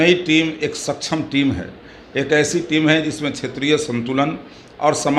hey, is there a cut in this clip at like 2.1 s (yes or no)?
no